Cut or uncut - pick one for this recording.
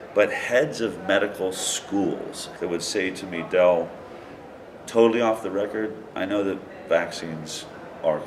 cut